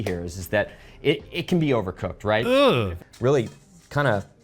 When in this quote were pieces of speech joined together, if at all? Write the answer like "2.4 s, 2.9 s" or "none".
3.0 s